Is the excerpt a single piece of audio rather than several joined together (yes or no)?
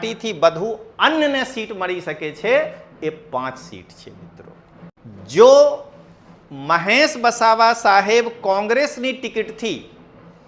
no